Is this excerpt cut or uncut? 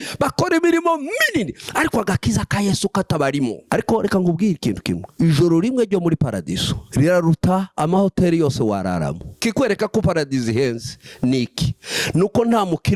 cut